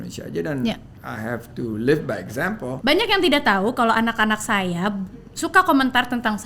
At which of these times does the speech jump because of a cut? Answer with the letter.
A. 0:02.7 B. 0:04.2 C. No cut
A